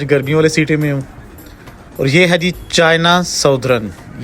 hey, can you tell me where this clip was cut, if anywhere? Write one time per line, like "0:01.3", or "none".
none